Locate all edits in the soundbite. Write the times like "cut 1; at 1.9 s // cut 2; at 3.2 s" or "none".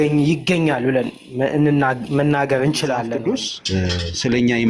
cut 1; at 3.1 s